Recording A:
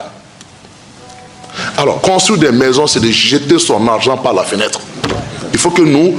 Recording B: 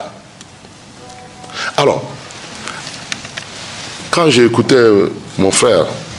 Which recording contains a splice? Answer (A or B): A